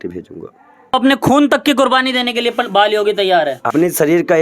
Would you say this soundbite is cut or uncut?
cut